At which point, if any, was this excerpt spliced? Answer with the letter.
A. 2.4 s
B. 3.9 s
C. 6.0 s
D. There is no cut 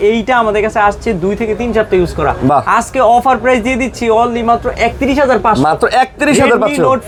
D